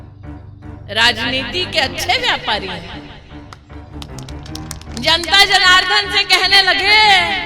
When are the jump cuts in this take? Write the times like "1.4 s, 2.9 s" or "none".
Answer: 0.8 s, 2.9 s, 4.6 s